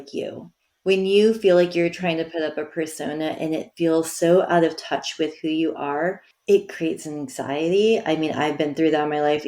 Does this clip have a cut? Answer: yes; 1 cut; at 6.3 s

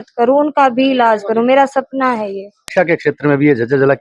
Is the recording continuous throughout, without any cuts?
no; 1 cut; at 2.6 s

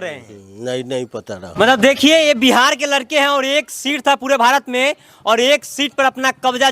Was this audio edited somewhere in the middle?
yes; 1 cut; at 1.4 s

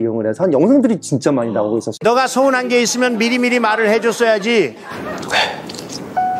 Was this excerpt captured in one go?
yes; 0 cuts

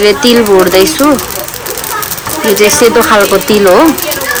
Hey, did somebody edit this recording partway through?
no; 0 cuts

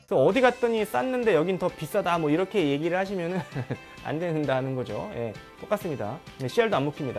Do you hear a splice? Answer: no; 0 cuts

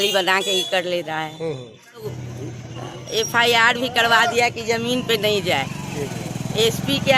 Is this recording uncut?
no; 1 cut; at 2.1 s

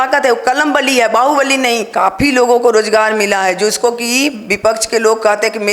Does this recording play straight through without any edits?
no; 1 cut; at 1.9 s

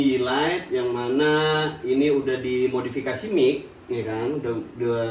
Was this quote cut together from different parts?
no; 0 cuts

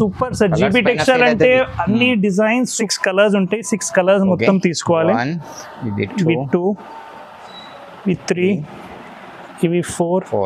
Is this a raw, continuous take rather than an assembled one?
no; 1 cut; at 2.8 s

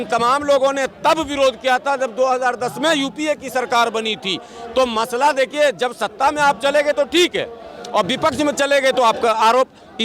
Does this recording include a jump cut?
no; 0 cuts

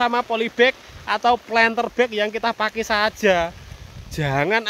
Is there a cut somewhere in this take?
no; 0 cuts

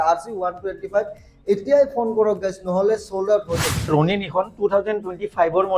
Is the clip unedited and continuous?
no; 1 cut; at 3.9 s

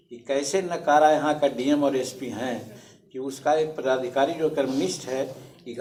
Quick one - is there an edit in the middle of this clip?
no; 0 cuts

